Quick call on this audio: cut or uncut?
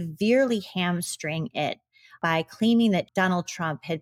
cut